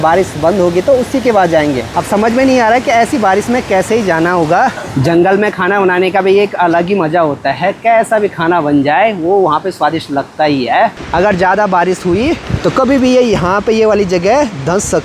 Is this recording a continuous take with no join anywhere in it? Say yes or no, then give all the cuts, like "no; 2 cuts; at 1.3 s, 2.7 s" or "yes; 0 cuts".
no; 3 cuts; at 1.9 s, 4.8 s, 11.0 s